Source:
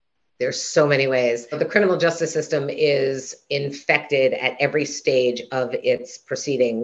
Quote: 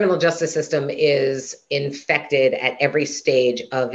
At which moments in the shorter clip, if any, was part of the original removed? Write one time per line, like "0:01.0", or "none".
none